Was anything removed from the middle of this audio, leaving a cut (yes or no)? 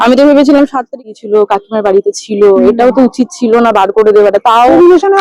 yes